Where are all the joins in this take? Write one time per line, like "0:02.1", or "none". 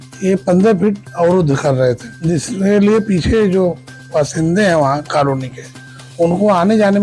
0:02.3